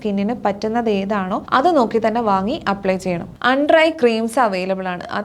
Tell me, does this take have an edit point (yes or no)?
yes